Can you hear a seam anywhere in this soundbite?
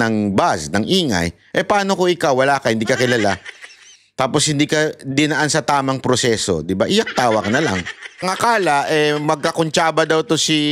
yes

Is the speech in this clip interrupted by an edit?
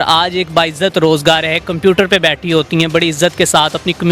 no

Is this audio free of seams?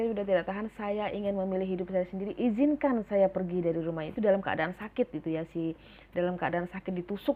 yes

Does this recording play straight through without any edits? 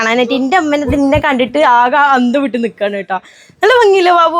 yes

